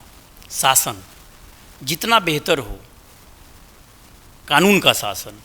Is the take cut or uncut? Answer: uncut